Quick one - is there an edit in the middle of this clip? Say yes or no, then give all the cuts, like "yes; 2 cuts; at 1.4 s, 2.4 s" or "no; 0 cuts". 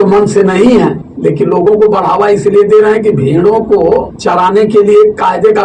yes; 2 cuts; at 1.1 s, 4.1 s